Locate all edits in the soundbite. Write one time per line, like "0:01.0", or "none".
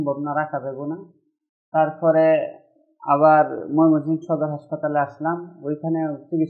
none